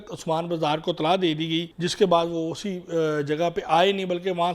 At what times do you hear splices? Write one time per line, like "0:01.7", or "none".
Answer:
0:01.8